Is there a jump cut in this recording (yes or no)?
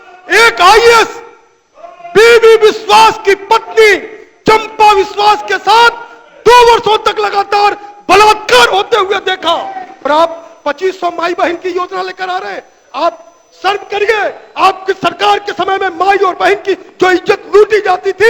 yes